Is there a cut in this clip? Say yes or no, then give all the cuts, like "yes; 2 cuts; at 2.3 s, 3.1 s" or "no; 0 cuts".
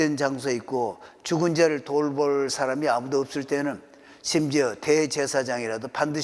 no; 0 cuts